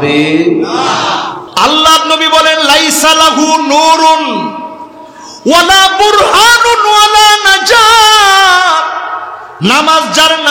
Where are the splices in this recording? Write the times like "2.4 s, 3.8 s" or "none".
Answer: 1.4 s